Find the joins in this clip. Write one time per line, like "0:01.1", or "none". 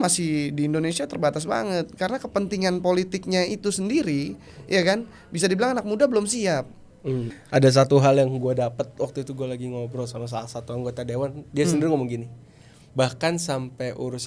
0:07.4